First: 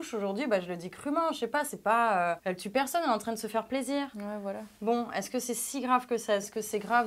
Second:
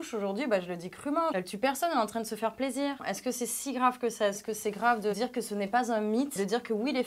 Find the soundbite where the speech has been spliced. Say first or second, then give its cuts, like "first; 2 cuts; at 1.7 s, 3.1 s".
second; 2 cuts; at 1.3 s, 3.0 s